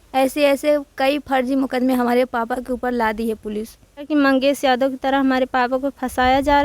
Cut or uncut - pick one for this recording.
cut